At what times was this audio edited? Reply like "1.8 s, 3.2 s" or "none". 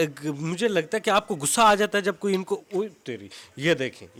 none